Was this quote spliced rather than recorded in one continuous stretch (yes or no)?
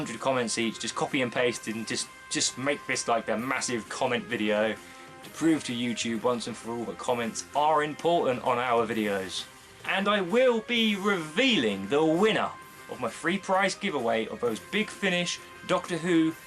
yes